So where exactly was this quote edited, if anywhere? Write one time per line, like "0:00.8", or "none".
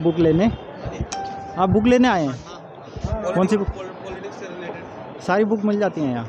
none